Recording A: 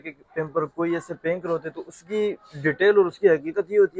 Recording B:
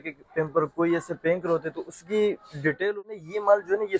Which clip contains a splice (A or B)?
B